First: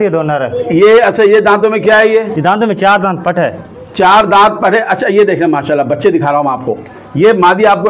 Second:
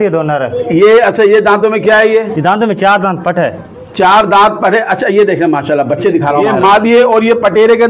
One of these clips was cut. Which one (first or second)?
second